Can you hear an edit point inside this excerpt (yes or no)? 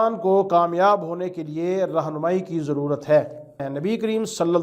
yes